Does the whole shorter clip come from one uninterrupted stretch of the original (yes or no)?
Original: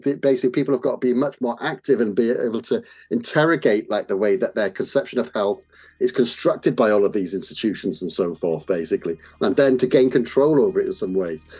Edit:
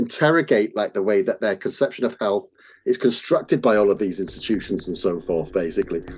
yes